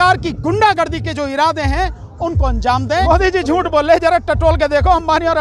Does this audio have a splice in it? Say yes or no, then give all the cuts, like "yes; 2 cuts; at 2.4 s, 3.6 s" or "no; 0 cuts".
yes; 1 cut; at 3.0 s